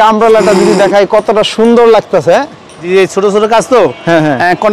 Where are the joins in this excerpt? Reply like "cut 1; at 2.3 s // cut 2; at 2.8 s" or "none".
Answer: cut 1; at 2.8 s